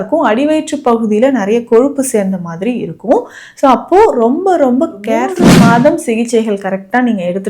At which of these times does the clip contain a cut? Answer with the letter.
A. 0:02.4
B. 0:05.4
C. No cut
B